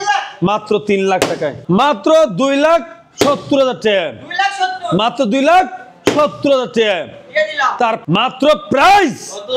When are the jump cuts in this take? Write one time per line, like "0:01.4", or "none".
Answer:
0:01.6
0:08.0